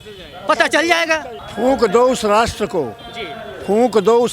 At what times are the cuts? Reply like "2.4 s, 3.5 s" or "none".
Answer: 1.4 s